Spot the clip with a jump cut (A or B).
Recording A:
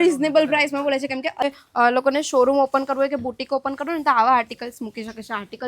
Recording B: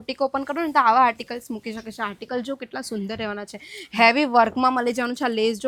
A